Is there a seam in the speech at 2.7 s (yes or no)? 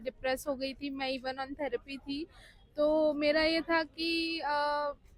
no